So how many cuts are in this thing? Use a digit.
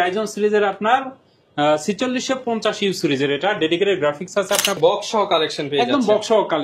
1